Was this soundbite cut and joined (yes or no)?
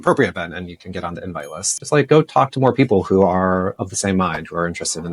yes